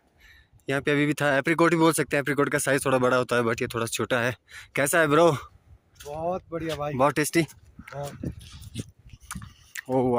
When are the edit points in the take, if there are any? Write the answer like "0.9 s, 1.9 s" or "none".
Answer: none

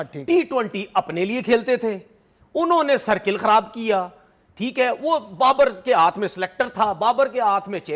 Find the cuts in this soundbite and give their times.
none

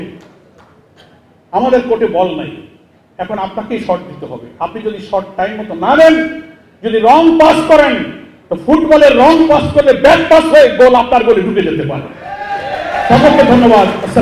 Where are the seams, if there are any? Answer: none

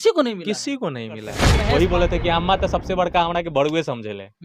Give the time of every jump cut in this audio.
1.5 s

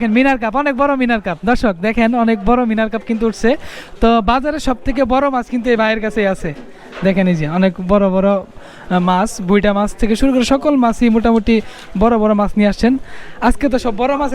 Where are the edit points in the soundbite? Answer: none

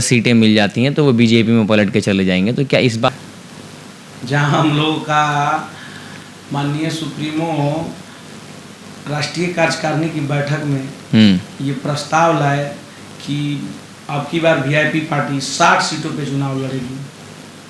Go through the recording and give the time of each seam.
none

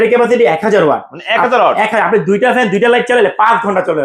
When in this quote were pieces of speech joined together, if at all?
none

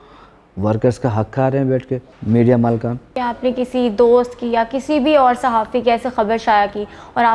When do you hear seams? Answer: 2.1 s, 3.1 s

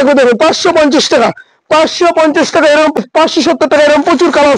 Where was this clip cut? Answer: 3.0 s

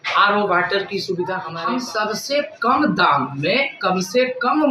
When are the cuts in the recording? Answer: 1.4 s

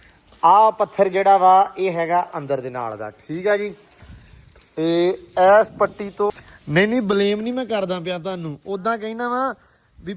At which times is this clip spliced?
6.4 s

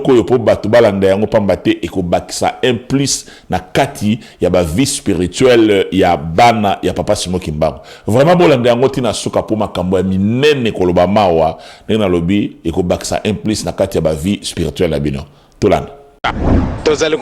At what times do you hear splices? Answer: 16.2 s

